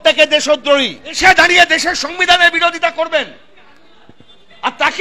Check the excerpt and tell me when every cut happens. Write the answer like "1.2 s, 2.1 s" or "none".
1.2 s